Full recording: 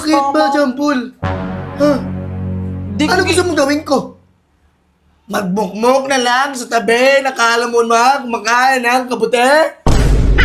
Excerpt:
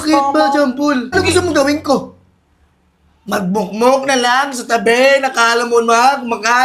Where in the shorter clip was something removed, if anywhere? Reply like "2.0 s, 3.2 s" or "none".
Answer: 1.1 s